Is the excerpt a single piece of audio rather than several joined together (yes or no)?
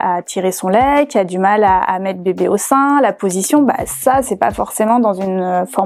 yes